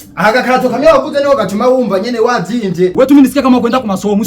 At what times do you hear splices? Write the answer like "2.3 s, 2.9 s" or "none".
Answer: 3.0 s